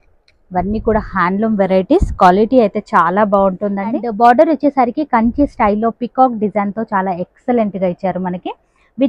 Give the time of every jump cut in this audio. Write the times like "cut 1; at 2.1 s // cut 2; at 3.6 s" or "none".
cut 1; at 4.1 s